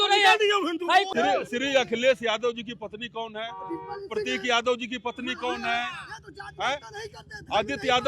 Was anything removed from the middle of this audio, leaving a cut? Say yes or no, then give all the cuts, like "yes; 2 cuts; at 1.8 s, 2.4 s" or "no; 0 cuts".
yes; 1 cut; at 1.1 s